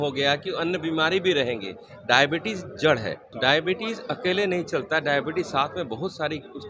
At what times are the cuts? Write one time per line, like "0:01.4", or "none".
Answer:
0:03.2

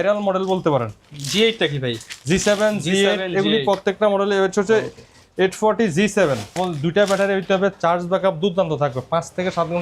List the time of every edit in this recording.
0:06.6

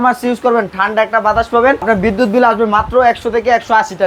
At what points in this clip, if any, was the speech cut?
0:01.8

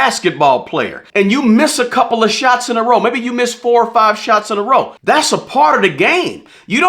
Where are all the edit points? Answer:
0:01.0
0:04.9

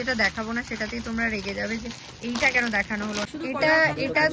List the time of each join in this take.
0:03.3

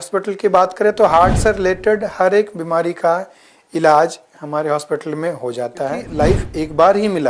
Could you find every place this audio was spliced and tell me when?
0:06.1

